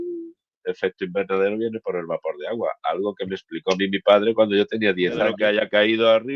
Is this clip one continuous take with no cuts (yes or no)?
no